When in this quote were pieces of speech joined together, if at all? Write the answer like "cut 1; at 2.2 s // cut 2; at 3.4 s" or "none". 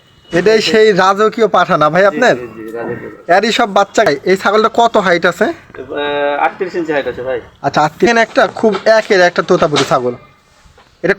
cut 1; at 4.1 s // cut 2; at 8.1 s